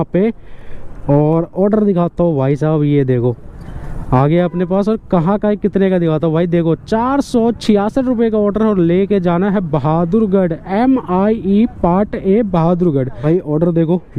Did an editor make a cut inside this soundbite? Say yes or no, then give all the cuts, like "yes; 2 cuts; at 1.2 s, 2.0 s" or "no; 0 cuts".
yes; 1 cut; at 13.1 s